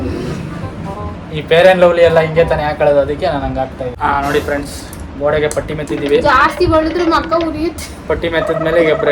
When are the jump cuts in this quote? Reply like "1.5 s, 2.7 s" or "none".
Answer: 3.9 s